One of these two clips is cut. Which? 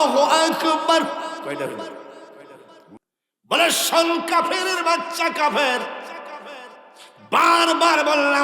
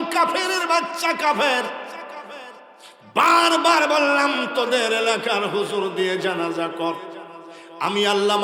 first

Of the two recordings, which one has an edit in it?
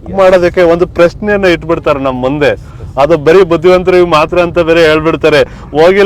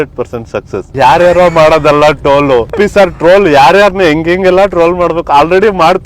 second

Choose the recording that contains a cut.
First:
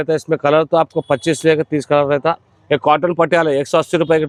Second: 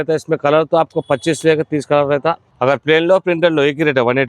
second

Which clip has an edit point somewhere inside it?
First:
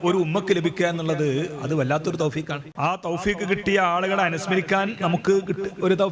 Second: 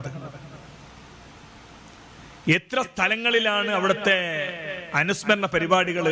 first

